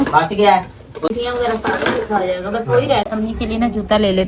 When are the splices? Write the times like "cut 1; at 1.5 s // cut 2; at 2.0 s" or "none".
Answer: cut 1; at 1.1 s // cut 2; at 3.1 s